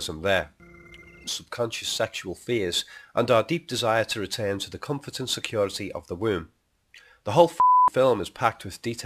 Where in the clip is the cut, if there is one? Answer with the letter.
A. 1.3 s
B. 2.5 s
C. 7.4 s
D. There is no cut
D